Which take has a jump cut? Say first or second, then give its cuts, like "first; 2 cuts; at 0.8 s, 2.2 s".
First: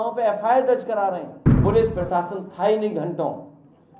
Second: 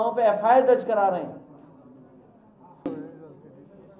first; 1 cut; at 1.6 s